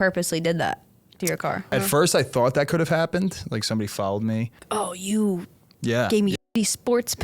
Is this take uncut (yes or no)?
no